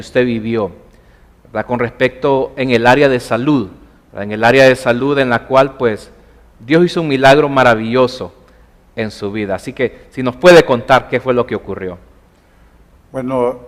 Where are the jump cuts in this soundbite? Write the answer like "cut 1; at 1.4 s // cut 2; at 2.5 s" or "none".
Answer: none